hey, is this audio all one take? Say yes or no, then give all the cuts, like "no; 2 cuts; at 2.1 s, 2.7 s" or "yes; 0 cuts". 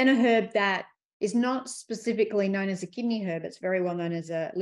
yes; 0 cuts